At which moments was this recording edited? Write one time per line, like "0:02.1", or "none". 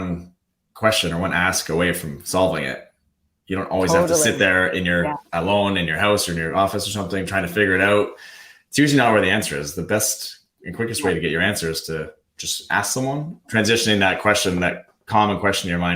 0:05.2
0:13.5